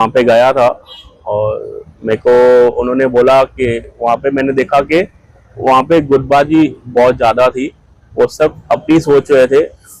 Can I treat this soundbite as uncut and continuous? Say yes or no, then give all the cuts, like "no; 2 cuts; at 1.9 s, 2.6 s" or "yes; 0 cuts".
yes; 0 cuts